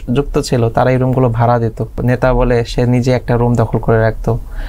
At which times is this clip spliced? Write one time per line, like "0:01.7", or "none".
0:02.0